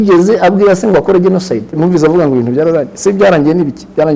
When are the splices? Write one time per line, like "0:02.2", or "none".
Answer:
0:01.8